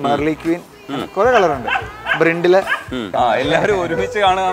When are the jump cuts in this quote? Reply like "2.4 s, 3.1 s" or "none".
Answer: 3.1 s